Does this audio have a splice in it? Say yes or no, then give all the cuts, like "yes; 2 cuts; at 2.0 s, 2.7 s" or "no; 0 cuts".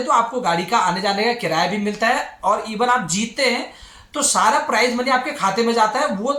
no; 0 cuts